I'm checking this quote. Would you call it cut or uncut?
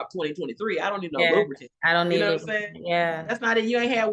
uncut